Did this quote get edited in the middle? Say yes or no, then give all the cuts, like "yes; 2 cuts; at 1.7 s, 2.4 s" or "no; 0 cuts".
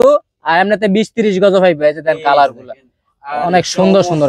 no; 0 cuts